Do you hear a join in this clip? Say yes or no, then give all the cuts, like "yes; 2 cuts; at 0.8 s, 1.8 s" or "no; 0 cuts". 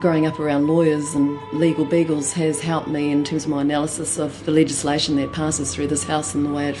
no; 0 cuts